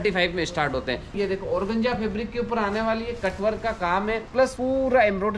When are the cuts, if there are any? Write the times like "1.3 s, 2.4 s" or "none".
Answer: 1.2 s, 4.5 s